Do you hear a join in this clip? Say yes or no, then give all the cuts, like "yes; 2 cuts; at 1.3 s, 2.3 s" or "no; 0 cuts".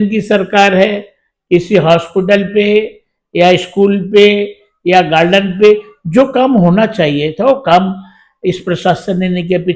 no; 0 cuts